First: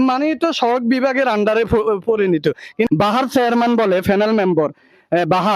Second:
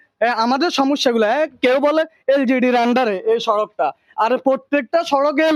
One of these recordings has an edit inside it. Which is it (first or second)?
first